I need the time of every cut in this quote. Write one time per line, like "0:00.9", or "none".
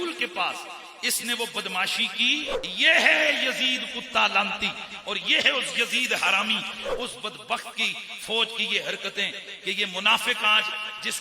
0:02.6
0:06.8